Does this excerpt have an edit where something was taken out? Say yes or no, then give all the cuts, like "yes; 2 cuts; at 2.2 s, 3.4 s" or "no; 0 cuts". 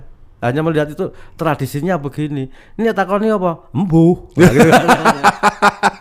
no; 0 cuts